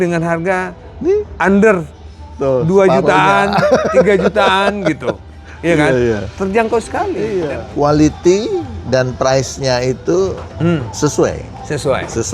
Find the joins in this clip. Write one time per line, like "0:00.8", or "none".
0:07.5